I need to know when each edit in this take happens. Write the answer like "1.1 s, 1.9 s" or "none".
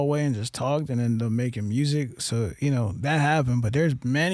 none